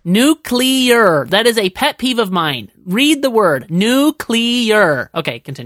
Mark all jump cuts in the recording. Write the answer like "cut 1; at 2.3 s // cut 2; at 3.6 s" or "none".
none

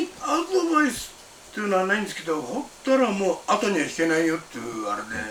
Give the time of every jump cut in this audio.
none

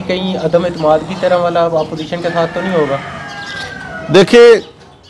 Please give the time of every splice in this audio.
none

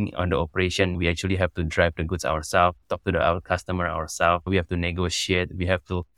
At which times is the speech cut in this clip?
cut 1; at 1.0 s // cut 2; at 2.8 s

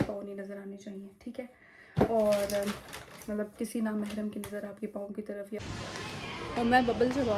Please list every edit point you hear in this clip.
cut 1; at 5.6 s

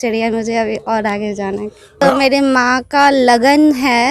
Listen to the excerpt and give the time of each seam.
cut 1; at 2.0 s

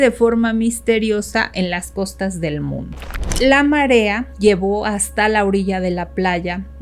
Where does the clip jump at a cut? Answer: cut 1; at 3.3 s // cut 2; at 4.3 s

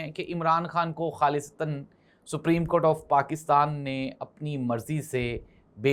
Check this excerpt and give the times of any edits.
none

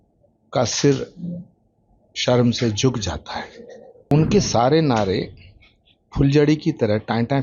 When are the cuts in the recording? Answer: cut 1; at 4.1 s

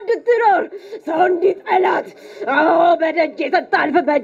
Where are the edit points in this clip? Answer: none

